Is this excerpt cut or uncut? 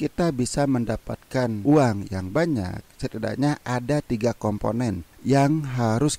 uncut